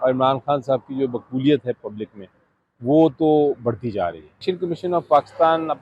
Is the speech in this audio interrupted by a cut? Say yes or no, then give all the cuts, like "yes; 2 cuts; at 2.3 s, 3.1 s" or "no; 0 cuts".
yes; 1 cut; at 4.5 s